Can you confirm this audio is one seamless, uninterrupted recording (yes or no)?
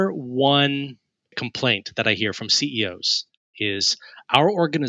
no